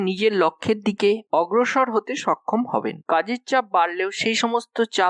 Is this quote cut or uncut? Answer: uncut